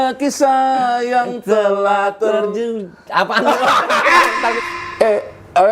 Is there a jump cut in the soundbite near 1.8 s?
no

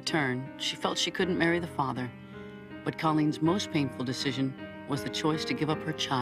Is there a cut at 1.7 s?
yes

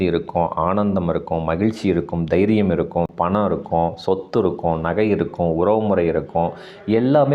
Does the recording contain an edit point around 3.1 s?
yes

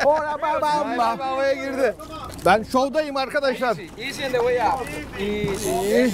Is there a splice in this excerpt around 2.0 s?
no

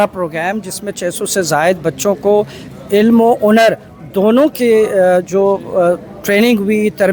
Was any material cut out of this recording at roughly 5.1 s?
no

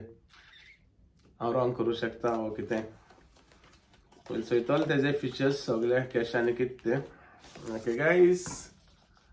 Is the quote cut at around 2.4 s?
no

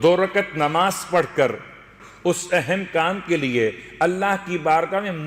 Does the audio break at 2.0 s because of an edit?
yes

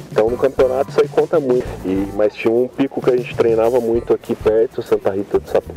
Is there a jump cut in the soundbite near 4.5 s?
no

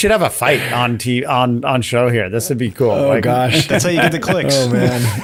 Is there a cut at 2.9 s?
no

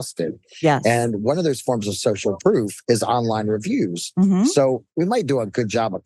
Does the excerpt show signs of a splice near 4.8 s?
yes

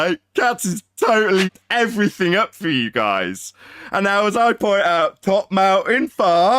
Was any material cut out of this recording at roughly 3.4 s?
no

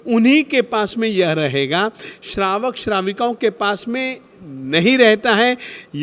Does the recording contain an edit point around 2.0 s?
no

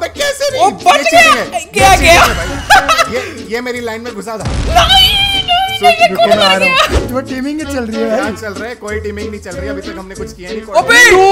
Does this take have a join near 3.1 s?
no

